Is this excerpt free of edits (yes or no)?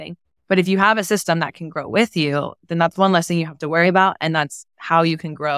yes